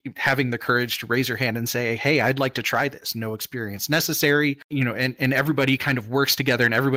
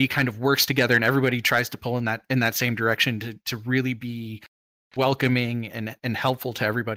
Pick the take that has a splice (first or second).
first